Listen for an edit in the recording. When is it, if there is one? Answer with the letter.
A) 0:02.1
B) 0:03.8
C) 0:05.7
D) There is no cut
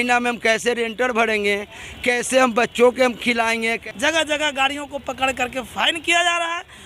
B